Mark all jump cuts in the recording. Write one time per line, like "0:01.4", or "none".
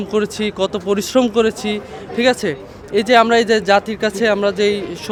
none